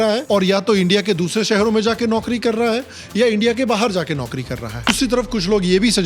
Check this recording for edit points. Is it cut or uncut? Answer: cut